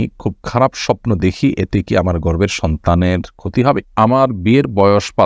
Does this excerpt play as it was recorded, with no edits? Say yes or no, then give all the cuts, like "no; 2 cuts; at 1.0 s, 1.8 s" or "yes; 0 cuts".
no; 1 cut; at 3.9 s